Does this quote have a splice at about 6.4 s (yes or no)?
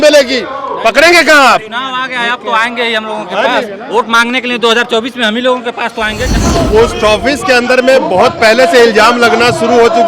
yes